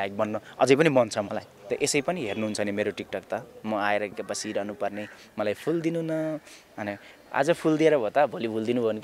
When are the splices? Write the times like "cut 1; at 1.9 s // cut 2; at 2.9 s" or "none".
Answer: cut 1; at 1.6 s